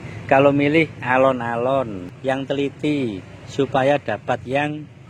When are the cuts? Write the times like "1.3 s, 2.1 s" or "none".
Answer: 2.0 s